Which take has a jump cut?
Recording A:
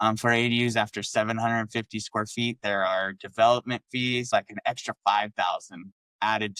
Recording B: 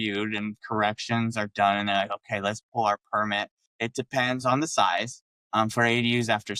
A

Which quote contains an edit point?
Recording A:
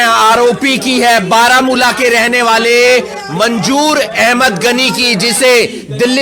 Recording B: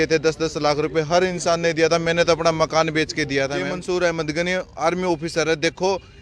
B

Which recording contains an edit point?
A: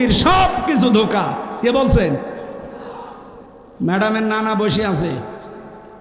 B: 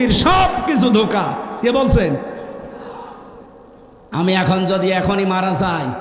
B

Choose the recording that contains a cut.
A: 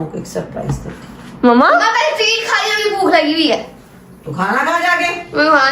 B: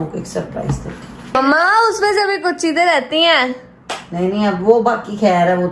B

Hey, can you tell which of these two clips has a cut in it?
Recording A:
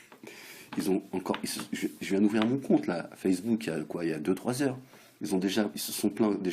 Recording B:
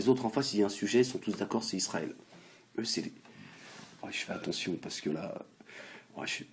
A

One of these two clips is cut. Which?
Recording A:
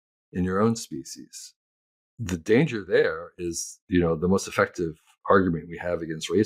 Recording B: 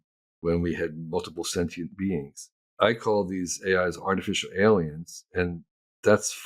B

